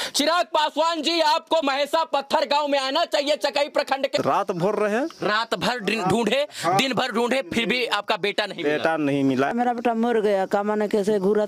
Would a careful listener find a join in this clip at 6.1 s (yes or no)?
no